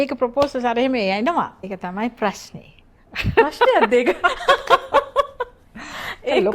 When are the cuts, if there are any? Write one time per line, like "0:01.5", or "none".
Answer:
0:01.6